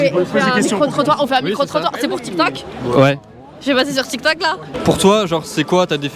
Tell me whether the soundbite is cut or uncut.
cut